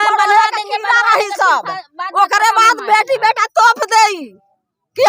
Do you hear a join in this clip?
no; 0 cuts

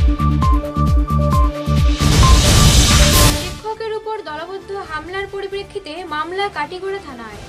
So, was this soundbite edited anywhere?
yes; 1 cut; at 3.3 s

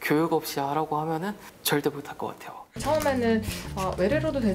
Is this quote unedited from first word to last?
no; 2 cuts; at 1.5 s, 2.8 s

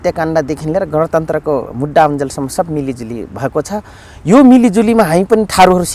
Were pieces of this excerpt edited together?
no; 0 cuts

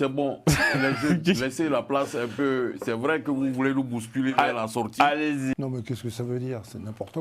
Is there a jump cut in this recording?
yes; 1 cut; at 5.5 s

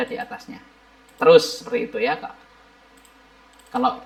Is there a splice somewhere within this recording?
no; 0 cuts

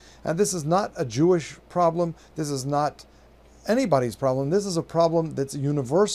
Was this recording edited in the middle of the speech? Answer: yes; 1 cut; at 1.6 s

